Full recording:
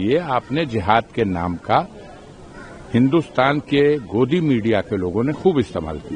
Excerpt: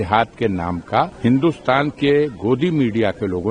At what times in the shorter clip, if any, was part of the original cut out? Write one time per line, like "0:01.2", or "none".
0:01.1